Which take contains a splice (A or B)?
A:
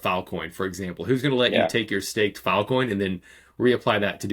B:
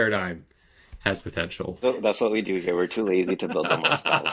B